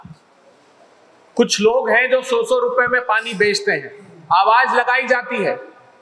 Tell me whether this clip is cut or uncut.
uncut